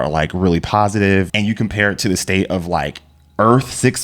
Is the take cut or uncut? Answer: cut